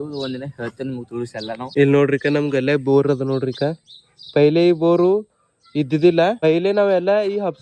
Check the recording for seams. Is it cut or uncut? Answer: cut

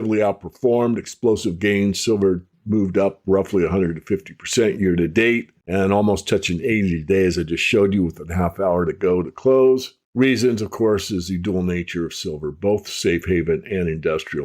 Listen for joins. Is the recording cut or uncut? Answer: cut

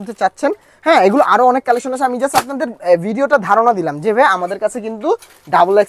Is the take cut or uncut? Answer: uncut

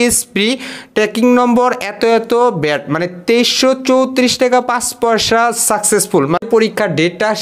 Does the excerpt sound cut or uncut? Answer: cut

